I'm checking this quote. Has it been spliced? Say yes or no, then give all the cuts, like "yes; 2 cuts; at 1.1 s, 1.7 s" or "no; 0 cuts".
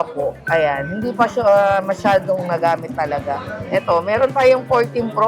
yes; 1 cut; at 3.6 s